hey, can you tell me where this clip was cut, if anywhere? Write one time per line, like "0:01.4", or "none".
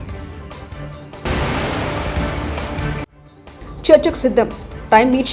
none